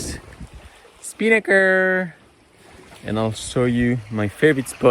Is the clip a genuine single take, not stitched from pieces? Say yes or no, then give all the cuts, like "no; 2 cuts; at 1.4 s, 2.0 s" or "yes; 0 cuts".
yes; 0 cuts